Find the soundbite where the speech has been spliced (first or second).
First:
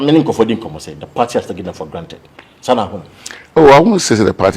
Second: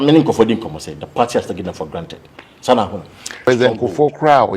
second